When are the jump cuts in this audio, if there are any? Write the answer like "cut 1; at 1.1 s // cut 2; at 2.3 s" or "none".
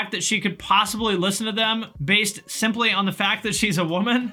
none